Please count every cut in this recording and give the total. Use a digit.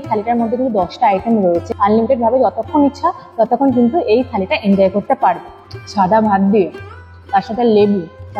2